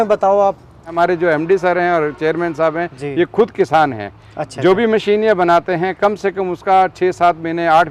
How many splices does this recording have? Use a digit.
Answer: 1